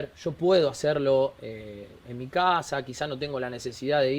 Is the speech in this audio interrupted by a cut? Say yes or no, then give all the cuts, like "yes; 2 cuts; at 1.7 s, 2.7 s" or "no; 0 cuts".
no; 0 cuts